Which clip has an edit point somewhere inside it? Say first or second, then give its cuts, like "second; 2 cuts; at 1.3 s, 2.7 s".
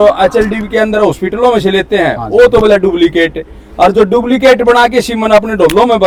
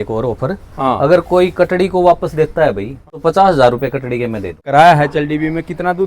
second; 2 cuts; at 3.2 s, 4.6 s